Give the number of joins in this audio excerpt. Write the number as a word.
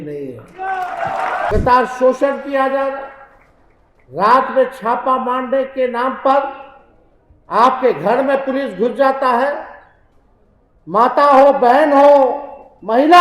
one